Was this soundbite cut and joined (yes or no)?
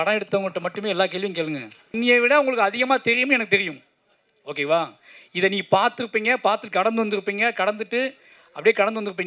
yes